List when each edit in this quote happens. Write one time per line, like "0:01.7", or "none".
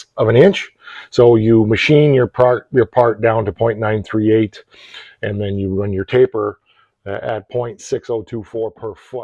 none